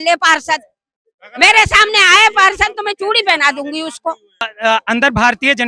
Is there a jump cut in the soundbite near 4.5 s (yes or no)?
yes